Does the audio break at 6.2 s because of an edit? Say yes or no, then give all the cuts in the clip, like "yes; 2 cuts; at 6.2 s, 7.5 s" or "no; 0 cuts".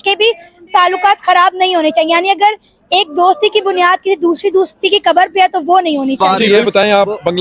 yes; 1 cut; at 6.2 s